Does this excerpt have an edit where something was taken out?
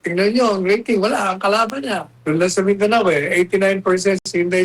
yes; 1 cut; at 2.1 s

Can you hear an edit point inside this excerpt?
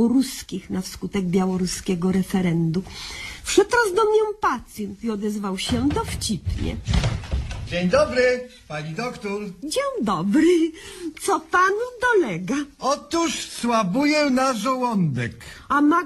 no; 0 cuts

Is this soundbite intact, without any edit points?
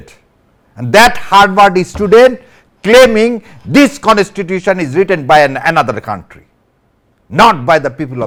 yes; 0 cuts

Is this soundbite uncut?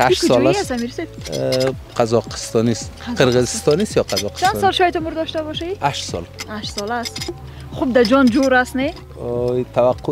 yes; 0 cuts

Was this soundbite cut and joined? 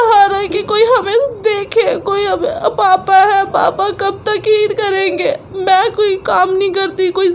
no; 0 cuts

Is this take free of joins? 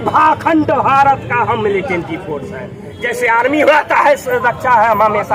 yes; 0 cuts

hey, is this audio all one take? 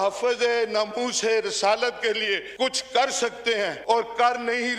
no; 2 cuts; at 2.5 s, 3.8 s

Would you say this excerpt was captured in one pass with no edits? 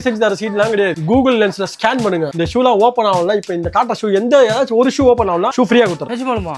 yes; 0 cuts

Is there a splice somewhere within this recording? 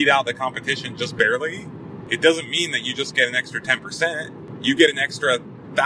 yes; 2 cuts; at 1.9 s, 4.5 s

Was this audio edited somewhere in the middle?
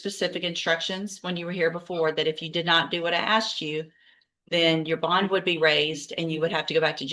no; 0 cuts

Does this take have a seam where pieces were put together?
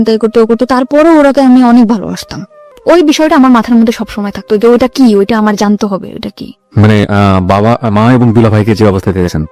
yes; 1 cut; at 2.7 s

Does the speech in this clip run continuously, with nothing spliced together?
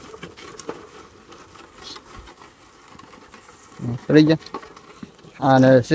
yes; 0 cuts

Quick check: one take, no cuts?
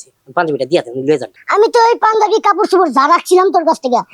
no; 1 cut; at 1.4 s

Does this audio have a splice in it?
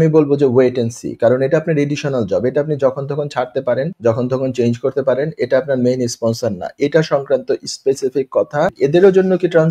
yes; 2 cuts; at 3.9 s, 8.7 s

